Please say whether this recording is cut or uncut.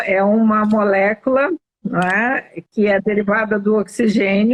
uncut